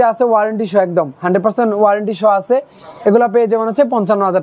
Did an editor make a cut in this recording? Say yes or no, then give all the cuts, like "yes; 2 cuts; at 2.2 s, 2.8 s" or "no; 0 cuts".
no; 0 cuts